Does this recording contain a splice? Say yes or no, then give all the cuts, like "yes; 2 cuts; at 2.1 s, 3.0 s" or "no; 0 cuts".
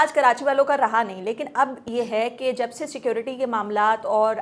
no; 0 cuts